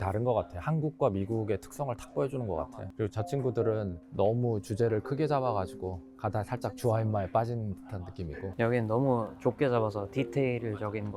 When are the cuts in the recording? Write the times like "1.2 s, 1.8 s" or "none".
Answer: none